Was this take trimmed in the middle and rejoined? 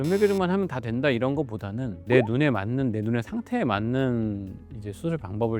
no; 0 cuts

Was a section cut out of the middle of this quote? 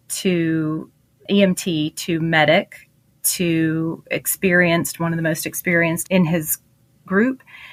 no; 0 cuts

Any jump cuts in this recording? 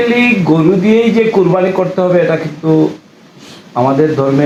no; 0 cuts

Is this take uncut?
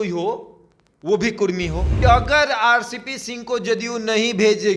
no; 1 cut; at 1.9 s

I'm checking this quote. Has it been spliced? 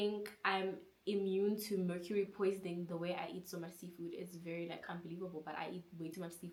no; 0 cuts

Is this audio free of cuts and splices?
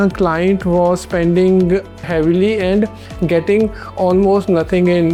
yes; 0 cuts

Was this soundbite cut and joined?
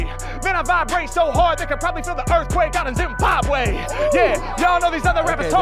no; 0 cuts

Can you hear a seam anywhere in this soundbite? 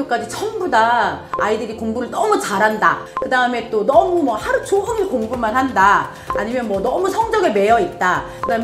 yes; 1 cut; at 3.1 s

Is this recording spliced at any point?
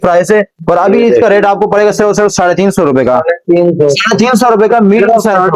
no; 0 cuts

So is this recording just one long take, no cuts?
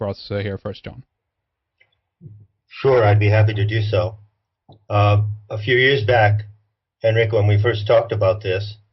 no; 1 cut; at 6.1 s

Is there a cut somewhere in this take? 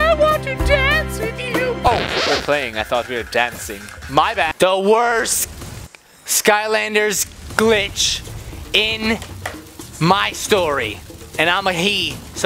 yes; 1 cut; at 4.5 s

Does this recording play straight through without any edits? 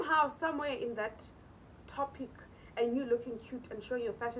yes; 0 cuts

